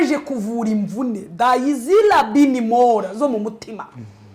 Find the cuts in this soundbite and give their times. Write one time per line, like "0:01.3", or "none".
none